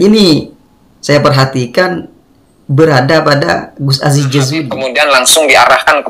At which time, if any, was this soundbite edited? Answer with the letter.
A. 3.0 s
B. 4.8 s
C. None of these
B